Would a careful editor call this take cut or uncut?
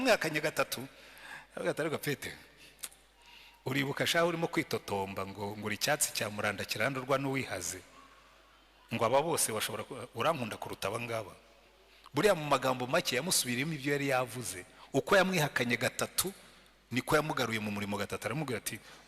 uncut